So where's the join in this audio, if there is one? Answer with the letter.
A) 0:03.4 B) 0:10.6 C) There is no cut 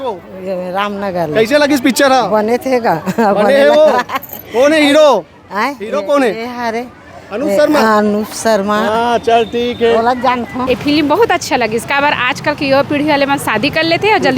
B